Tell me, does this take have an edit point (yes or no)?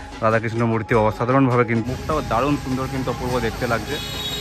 yes